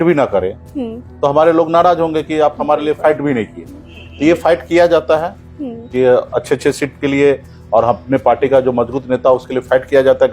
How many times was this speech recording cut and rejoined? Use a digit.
0